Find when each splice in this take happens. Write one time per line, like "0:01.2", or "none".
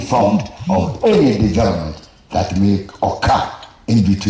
none

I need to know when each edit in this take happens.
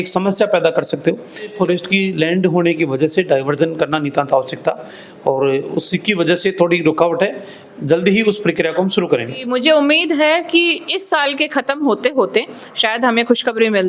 0:01.5
0:09.4

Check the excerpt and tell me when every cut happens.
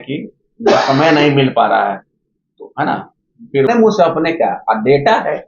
0:03.7

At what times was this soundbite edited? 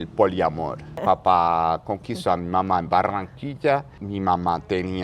0:01.0
0:04.0

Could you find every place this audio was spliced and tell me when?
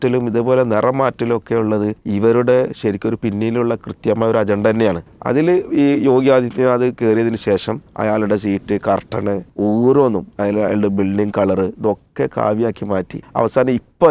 0:02.0
0:05.1
0:07.8
0:09.5
0:13.2

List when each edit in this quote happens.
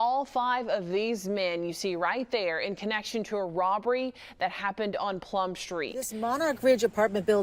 0:06.0

